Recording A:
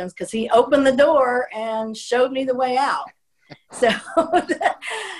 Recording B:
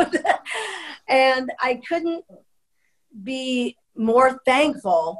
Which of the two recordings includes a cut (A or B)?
B